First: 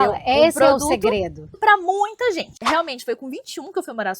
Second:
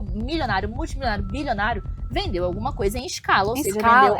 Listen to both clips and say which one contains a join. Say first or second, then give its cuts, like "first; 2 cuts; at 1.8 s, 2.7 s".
first; 2 cuts; at 1.5 s, 2.5 s